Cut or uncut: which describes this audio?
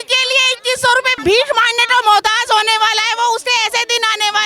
cut